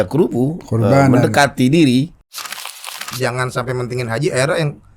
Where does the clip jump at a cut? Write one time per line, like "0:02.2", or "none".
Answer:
0:02.7